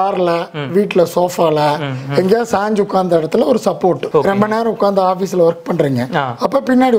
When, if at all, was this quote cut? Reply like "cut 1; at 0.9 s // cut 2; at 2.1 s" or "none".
none